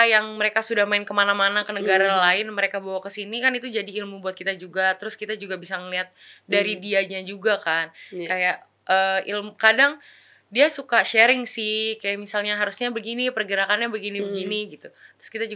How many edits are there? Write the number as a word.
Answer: zero